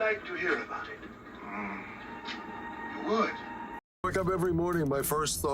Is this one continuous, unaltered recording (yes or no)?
no